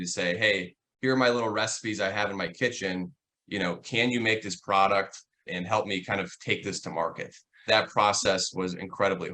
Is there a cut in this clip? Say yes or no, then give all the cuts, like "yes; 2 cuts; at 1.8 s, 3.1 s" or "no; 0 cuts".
yes; 2 cuts; at 5.5 s, 7.6 s